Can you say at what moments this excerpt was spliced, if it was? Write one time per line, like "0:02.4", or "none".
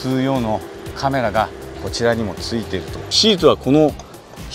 0:03.1